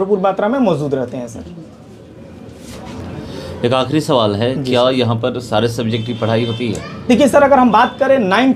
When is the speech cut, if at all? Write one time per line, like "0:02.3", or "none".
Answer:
none